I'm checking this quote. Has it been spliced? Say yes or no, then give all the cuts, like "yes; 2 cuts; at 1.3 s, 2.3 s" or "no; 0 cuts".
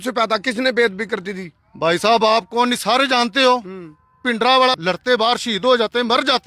yes; 1 cut; at 4.8 s